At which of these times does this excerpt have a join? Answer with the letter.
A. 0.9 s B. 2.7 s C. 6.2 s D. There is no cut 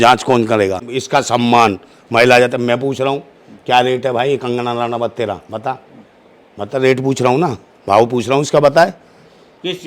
A